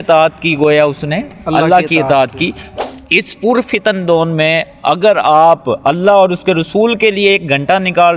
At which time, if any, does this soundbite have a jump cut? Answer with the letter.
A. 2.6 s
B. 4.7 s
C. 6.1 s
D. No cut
A